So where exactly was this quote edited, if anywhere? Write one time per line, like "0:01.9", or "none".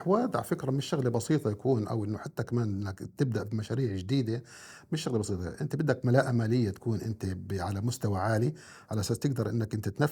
none